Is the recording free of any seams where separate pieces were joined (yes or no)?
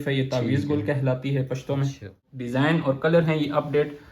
no